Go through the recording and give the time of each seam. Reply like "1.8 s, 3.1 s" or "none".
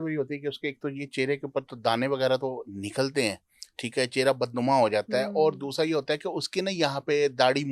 none